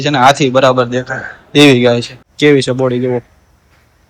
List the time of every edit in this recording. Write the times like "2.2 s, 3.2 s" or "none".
2.2 s